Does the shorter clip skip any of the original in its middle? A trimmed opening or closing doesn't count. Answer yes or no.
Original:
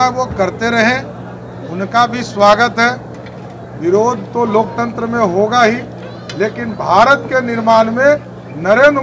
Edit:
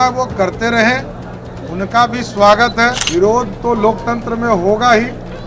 yes